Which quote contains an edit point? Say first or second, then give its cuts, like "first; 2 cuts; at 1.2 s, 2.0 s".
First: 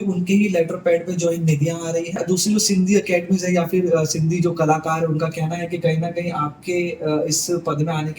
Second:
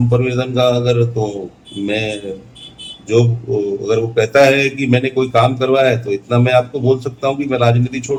first; 1 cut; at 2.2 s